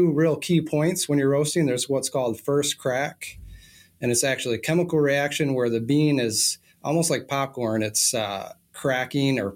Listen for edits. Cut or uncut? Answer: uncut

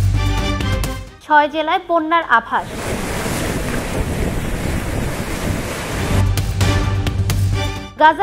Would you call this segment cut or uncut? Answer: cut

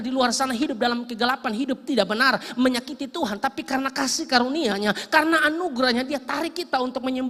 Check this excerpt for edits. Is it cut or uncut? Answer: uncut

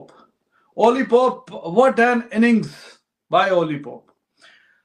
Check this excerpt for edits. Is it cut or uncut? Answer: uncut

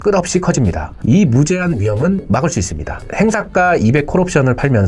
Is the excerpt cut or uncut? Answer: cut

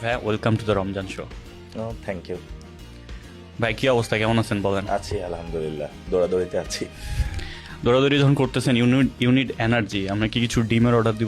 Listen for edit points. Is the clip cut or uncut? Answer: uncut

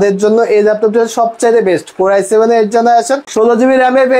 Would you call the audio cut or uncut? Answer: cut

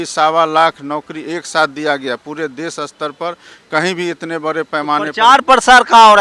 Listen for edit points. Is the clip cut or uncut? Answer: uncut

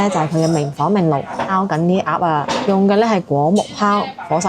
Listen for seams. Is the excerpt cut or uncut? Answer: cut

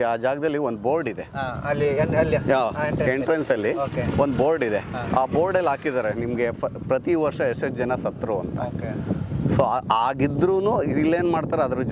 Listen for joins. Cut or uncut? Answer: uncut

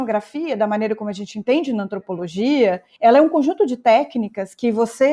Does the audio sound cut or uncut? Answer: cut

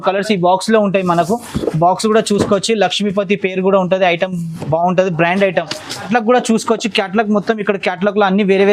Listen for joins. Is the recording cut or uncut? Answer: uncut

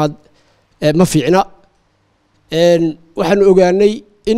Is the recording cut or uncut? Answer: uncut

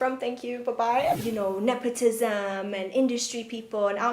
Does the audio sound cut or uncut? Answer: cut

